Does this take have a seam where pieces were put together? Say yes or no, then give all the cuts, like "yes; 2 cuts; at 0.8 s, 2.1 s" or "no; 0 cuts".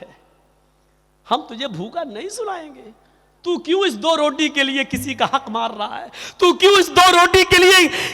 no; 0 cuts